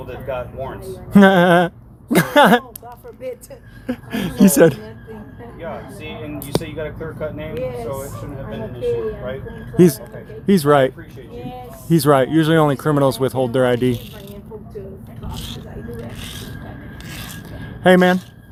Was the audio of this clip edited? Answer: no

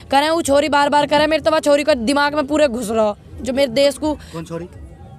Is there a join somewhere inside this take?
no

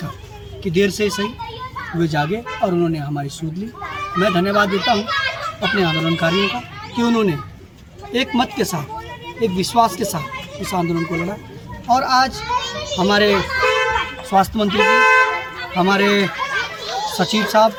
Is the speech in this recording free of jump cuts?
yes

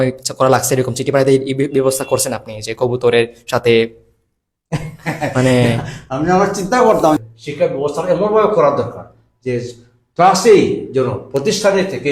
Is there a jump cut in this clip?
yes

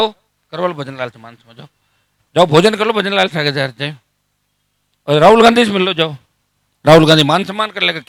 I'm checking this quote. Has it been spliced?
no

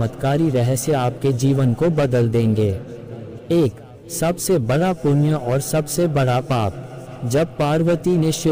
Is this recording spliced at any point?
no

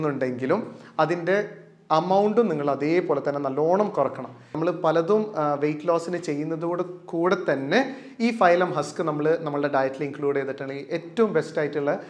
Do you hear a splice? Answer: yes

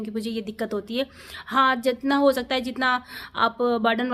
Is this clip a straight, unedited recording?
yes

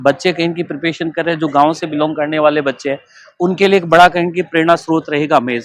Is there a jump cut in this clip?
no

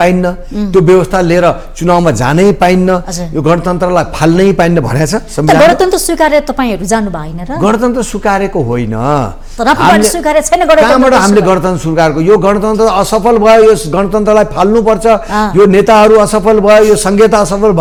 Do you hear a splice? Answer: no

